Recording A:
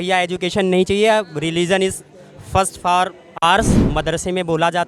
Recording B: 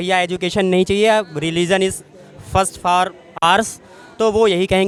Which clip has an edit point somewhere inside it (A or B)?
A